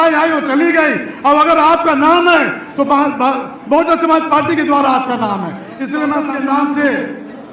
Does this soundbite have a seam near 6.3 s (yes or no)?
yes